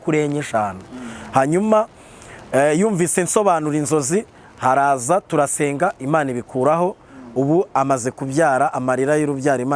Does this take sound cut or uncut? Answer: uncut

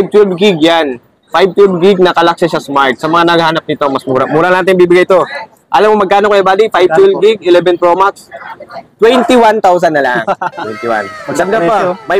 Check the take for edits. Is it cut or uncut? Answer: uncut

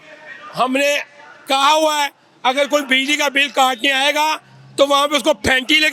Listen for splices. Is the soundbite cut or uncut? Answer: uncut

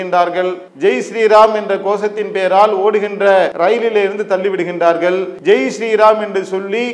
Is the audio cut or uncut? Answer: cut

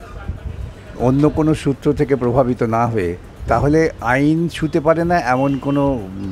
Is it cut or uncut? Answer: cut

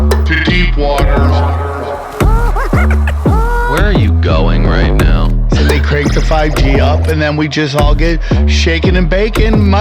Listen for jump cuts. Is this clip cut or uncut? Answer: uncut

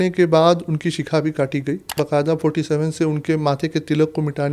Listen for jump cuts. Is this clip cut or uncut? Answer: cut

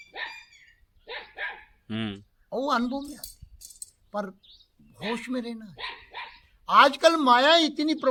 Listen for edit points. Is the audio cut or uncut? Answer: uncut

